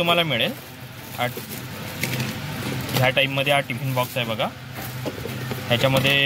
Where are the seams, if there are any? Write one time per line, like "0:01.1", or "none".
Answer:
none